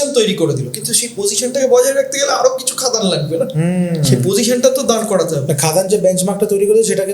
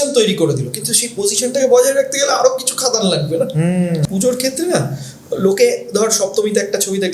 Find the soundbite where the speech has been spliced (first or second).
second